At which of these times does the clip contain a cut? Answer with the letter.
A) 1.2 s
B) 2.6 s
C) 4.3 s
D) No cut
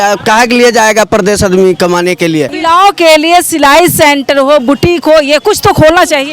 B